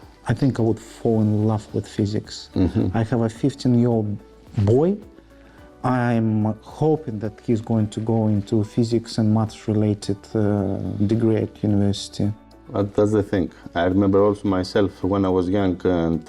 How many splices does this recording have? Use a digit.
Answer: 0